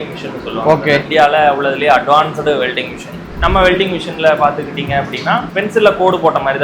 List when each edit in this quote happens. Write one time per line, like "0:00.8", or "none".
0:01.1
0:03.2